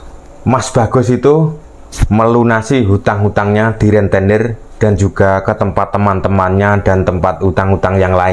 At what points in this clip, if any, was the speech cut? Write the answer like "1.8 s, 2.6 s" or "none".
none